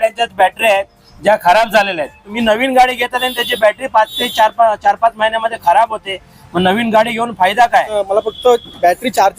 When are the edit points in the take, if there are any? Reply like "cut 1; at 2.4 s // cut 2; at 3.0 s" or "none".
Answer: cut 1; at 2.3 s // cut 2; at 8.0 s